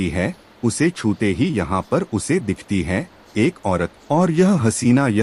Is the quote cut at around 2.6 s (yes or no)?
no